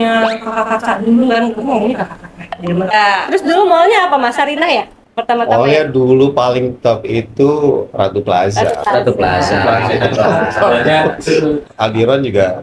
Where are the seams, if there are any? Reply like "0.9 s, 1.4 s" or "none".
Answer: 2.9 s, 11.7 s